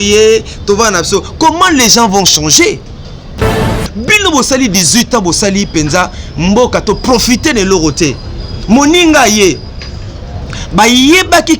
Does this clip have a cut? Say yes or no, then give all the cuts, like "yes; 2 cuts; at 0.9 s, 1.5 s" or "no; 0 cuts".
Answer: yes; 1 cut; at 3.6 s